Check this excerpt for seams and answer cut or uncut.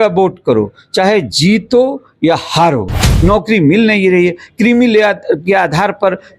cut